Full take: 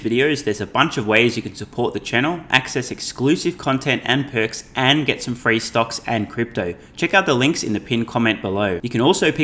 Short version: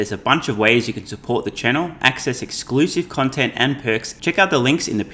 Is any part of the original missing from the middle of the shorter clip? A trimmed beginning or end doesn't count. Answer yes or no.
yes